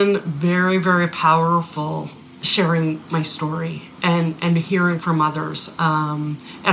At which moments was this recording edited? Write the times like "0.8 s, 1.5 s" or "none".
2.1 s